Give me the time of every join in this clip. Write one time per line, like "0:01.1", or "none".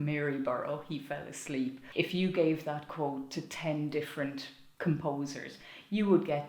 0:01.8
0:03.2